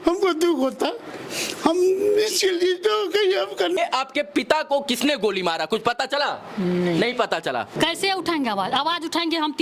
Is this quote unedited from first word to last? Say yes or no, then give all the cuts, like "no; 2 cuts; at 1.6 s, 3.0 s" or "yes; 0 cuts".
no; 2 cuts; at 3.8 s, 7.7 s